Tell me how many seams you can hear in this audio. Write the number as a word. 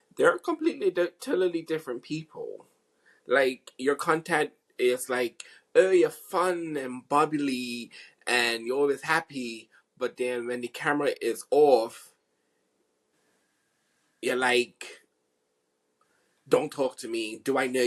zero